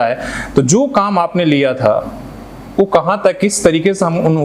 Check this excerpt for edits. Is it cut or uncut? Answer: uncut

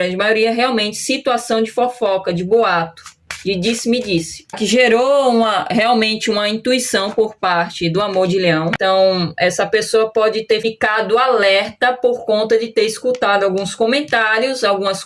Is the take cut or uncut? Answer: cut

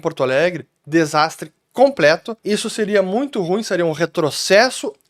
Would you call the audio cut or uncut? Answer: uncut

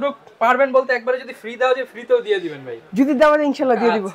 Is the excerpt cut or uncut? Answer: uncut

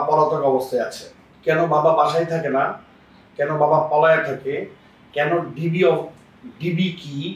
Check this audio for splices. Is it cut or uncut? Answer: uncut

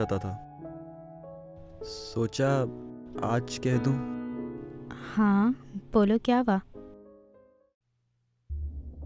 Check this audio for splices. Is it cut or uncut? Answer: uncut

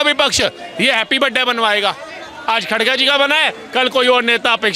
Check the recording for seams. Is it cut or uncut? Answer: uncut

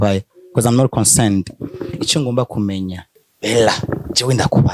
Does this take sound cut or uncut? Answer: cut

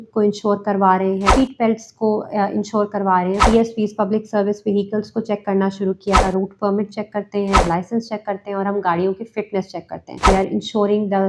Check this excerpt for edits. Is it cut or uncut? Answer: cut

